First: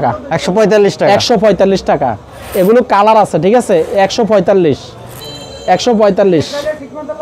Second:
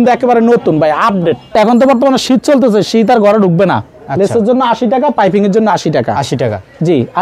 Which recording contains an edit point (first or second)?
second